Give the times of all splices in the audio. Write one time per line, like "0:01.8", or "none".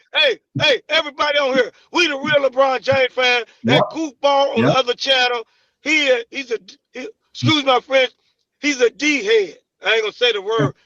none